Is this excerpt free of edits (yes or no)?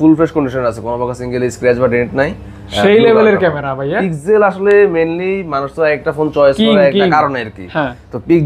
yes